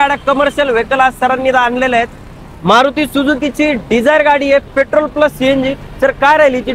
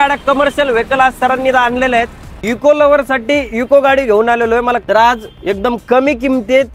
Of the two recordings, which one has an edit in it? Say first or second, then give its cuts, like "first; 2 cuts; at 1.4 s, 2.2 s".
second; 2 cuts; at 2.3 s, 4.8 s